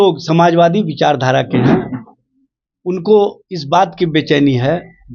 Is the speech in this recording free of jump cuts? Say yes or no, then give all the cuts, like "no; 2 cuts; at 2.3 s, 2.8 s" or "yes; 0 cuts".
yes; 0 cuts